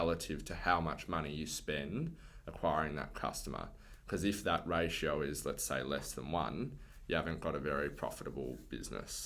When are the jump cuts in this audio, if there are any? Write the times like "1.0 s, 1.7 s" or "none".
none